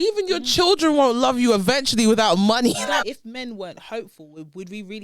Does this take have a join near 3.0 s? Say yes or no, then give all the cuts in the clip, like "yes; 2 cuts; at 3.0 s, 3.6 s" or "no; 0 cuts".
yes; 1 cut; at 3.0 s